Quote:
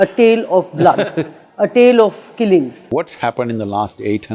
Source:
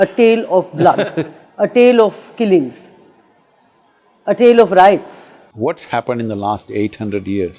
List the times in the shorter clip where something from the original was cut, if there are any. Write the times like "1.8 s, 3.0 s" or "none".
2.8 s